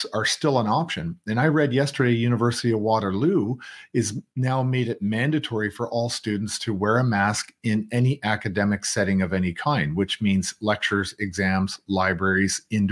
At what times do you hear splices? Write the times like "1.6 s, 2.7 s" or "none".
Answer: none